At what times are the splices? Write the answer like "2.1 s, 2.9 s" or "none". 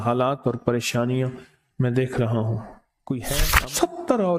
3.5 s